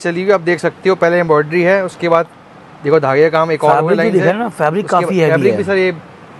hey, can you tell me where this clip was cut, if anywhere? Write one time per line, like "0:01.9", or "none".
none